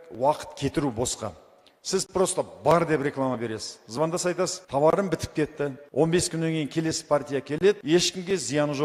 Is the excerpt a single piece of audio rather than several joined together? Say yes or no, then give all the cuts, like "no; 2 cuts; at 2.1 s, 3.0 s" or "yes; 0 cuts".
yes; 0 cuts